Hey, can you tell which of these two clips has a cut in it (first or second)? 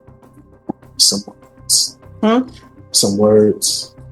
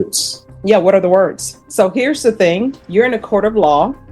second